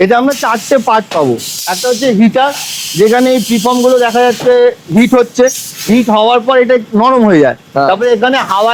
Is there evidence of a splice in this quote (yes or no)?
no